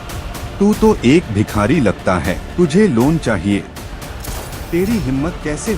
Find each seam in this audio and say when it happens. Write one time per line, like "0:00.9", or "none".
0:02.4